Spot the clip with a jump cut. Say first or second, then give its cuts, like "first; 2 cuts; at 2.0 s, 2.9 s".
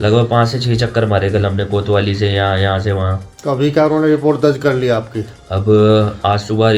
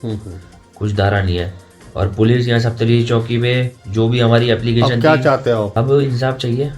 second; 1 cut; at 5.7 s